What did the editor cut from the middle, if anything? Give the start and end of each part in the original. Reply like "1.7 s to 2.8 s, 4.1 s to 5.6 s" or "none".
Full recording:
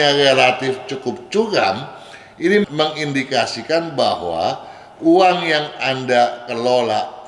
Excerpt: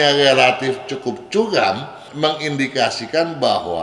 2.1 s to 2.7 s